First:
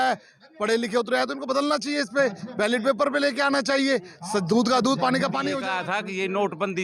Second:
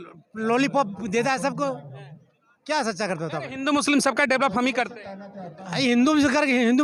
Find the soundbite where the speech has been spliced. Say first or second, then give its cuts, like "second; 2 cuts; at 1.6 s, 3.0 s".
first; 1 cut; at 5.6 s